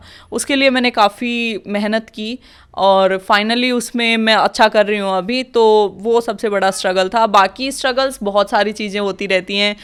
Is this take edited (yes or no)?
no